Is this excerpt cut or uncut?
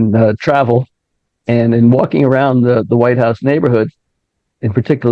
uncut